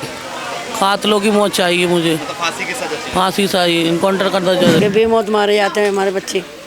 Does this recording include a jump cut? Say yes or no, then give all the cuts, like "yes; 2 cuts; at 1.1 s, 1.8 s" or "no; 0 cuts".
yes; 1 cut; at 4.8 s